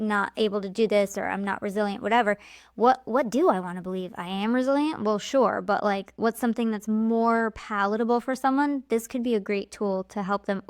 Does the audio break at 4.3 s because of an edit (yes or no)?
no